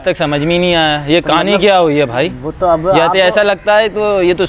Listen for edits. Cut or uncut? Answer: uncut